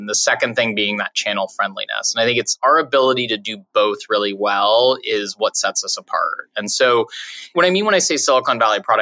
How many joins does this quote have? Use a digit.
0